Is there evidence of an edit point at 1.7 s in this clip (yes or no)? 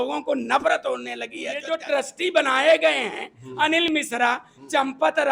yes